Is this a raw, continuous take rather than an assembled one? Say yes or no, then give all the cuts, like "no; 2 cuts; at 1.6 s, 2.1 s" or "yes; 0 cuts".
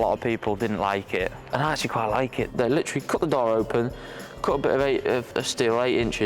no; 3 cuts; at 1.4 s, 2.5 s, 5.4 s